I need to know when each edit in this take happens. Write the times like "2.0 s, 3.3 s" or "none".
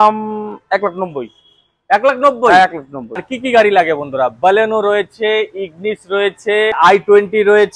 3.2 s, 6.8 s